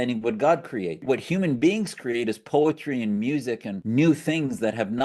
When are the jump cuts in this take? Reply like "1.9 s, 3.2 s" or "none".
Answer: 1.0 s, 3.7 s